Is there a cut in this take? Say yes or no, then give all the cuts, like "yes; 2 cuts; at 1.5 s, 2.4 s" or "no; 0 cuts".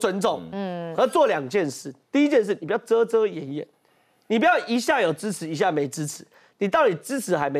no; 0 cuts